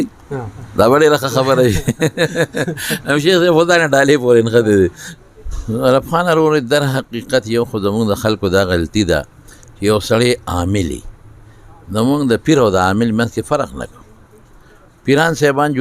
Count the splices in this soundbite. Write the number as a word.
one